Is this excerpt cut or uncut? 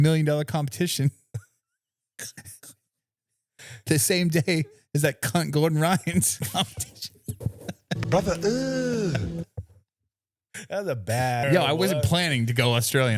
cut